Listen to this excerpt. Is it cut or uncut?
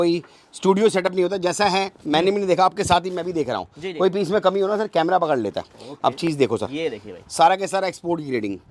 uncut